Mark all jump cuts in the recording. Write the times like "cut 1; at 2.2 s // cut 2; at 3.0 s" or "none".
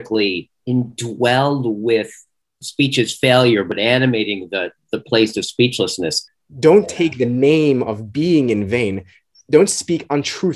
cut 1; at 2.6 s // cut 2; at 3.7 s // cut 3; at 6.2 s // cut 4; at 9.3 s